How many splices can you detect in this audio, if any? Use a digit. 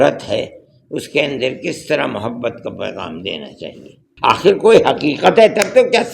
1